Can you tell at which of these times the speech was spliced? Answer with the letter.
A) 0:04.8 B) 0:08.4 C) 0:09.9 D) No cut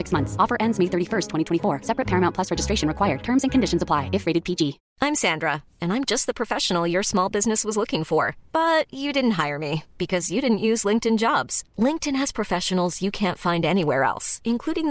A